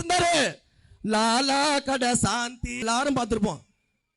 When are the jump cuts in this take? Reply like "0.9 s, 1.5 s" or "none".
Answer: 2.8 s